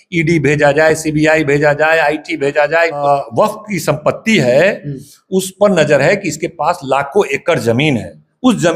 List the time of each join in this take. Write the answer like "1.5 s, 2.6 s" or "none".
3.0 s